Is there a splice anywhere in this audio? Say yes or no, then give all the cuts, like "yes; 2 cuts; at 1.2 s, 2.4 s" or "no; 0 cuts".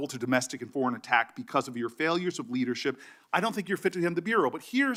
no; 0 cuts